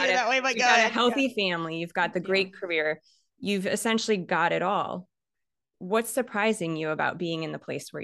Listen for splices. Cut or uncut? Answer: uncut